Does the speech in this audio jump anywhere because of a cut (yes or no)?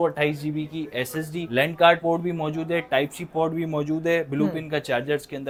no